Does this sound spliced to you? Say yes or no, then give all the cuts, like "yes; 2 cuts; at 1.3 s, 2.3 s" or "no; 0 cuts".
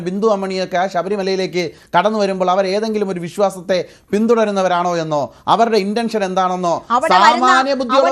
no; 0 cuts